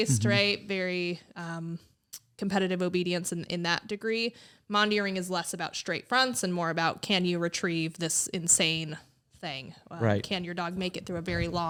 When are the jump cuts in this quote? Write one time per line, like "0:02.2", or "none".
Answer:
none